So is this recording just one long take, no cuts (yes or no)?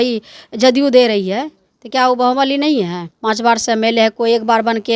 no